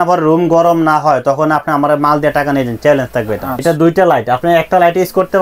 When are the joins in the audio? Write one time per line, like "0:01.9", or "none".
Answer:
0:03.6